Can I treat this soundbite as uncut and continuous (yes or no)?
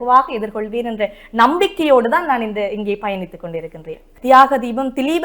no